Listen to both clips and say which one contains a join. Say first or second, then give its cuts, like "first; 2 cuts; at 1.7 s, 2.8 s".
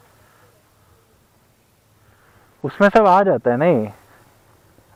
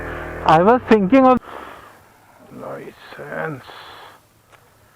second; 1 cut; at 1.4 s